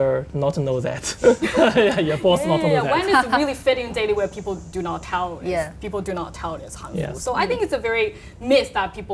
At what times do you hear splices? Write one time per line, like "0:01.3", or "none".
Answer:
none